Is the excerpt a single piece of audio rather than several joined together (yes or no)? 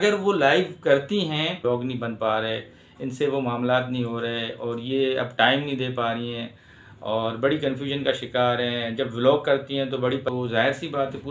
no